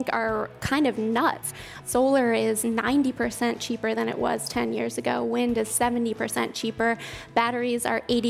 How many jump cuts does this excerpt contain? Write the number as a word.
one